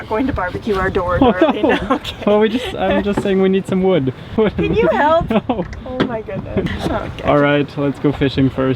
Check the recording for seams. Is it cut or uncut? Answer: cut